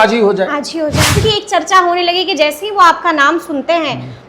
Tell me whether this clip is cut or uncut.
cut